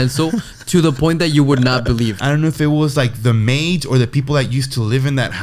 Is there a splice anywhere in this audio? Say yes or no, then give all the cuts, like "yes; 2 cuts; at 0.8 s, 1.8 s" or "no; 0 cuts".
yes; 1 cut; at 2.2 s